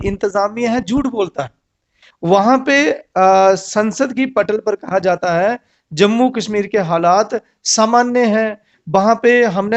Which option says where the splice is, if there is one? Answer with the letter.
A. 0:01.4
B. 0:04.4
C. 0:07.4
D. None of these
D